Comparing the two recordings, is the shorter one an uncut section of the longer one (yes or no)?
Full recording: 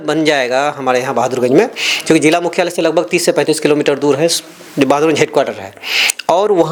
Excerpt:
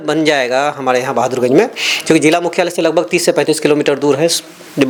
yes